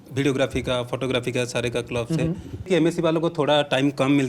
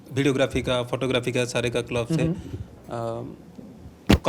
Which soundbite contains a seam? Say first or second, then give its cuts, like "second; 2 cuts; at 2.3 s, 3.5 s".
first; 1 cut; at 2.7 s